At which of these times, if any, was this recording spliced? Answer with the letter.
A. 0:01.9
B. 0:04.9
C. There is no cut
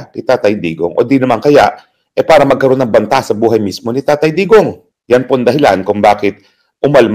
B